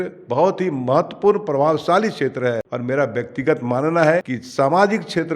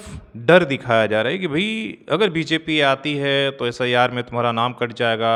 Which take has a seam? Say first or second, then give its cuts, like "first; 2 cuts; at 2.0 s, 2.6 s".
first; 2 cuts; at 2.7 s, 4.4 s